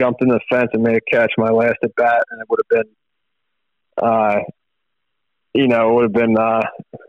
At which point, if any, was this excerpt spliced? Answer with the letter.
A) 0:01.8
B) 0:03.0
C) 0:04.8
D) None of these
D